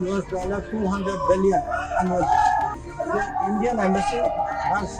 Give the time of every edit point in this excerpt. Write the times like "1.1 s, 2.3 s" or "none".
2.8 s